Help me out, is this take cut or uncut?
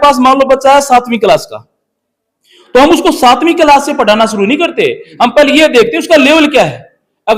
uncut